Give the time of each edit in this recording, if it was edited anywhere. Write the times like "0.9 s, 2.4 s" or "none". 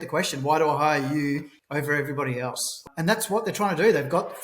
1.6 s, 2.8 s